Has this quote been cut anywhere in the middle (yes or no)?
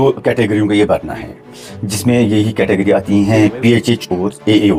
no